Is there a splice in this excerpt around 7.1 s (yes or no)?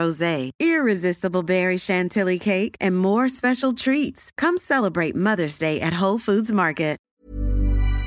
yes